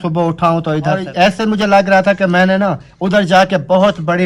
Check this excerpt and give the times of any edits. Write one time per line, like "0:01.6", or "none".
0:01.0